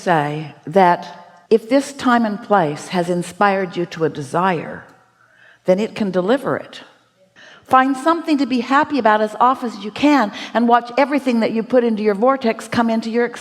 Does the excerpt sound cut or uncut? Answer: cut